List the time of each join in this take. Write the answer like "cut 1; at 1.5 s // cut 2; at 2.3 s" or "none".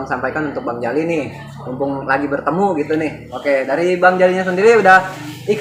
cut 1; at 3.2 s